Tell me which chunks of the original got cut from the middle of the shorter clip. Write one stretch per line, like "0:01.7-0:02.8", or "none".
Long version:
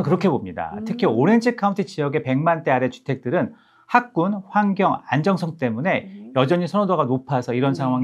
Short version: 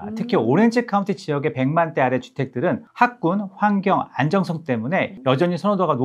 0:03.6-0:03.8
0:06.1-0:06.2